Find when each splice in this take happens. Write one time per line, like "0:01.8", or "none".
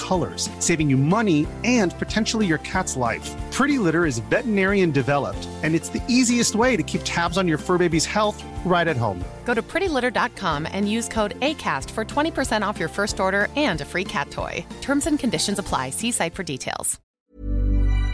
0:17.0